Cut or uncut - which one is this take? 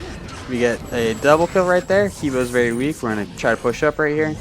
cut